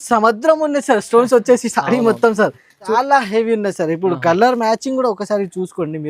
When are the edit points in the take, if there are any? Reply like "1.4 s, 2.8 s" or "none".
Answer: 2.7 s